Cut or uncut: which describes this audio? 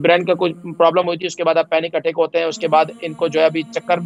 uncut